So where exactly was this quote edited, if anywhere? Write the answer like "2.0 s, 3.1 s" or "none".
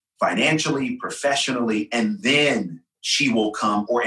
3.0 s